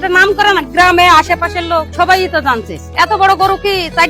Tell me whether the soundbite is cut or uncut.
cut